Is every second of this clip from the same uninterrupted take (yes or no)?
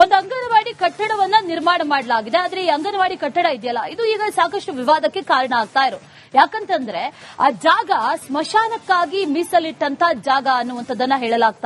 yes